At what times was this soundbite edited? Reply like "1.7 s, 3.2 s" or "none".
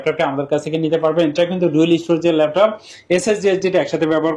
none